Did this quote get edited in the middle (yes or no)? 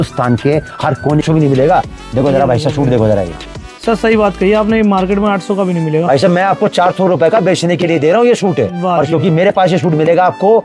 yes